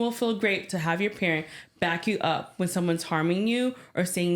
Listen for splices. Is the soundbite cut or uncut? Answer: uncut